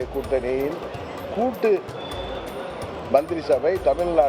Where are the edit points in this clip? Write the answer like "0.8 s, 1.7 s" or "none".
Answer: none